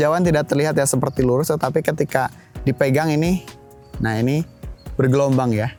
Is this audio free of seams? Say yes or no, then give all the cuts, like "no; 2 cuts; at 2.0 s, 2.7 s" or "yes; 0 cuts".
yes; 0 cuts